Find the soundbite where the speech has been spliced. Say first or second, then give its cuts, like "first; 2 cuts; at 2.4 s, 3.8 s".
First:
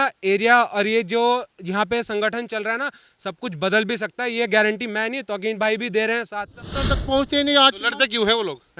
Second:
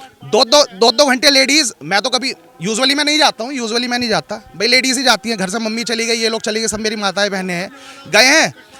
first; 1 cut; at 6.6 s